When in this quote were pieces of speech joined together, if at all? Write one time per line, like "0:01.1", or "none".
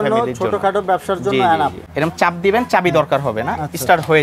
0:01.8